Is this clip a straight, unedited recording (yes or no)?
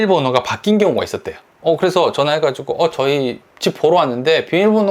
yes